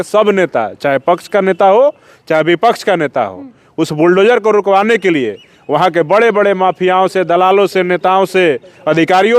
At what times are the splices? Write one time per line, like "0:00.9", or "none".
none